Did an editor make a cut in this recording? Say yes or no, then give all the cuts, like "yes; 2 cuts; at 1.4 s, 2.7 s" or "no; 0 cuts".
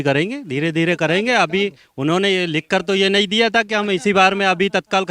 no; 0 cuts